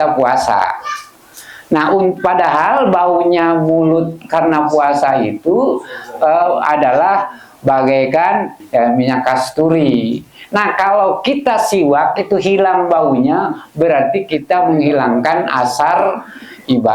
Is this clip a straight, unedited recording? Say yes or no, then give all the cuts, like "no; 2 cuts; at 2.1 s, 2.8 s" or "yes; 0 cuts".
no; 1 cut; at 8.6 s